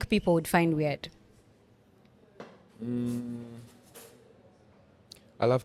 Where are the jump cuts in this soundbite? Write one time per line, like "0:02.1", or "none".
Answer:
none